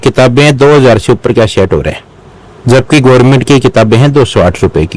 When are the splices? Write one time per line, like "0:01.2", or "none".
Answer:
none